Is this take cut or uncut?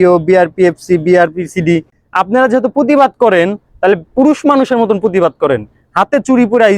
cut